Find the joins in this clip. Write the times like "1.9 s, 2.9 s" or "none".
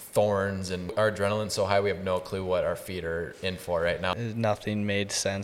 0.9 s, 4.1 s